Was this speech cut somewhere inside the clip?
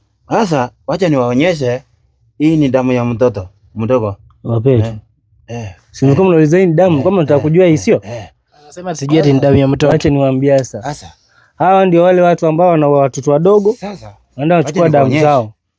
no; 0 cuts

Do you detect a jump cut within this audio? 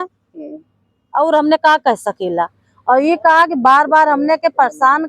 no; 0 cuts

